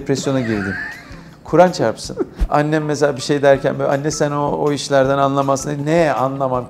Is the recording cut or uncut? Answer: cut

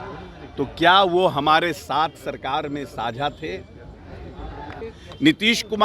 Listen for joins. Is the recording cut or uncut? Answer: cut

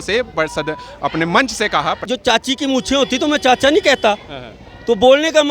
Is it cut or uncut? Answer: cut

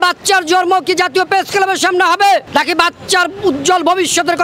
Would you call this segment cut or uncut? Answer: uncut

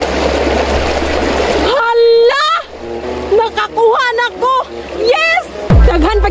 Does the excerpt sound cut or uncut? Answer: uncut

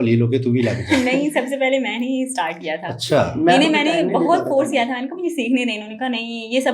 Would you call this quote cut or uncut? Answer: uncut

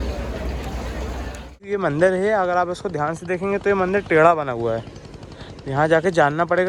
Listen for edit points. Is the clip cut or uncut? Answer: cut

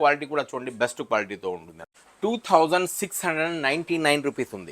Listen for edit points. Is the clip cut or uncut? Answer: cut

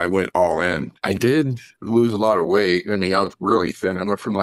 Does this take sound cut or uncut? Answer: cut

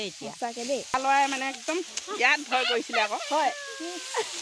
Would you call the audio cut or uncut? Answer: cut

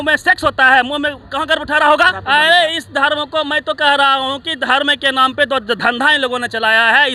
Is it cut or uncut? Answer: cut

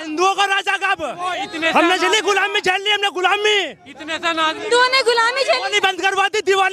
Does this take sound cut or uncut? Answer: uncut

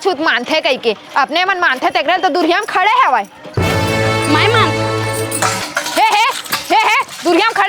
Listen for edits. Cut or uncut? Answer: uncut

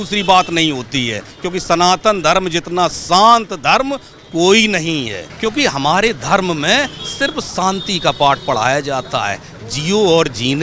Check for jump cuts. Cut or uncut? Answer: cut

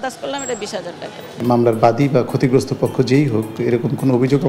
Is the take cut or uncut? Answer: cut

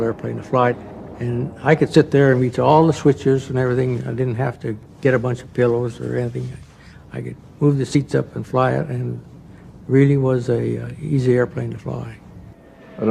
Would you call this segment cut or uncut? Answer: cut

